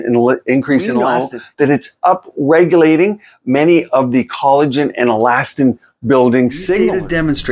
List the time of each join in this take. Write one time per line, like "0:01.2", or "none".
0:01.2
0:06.8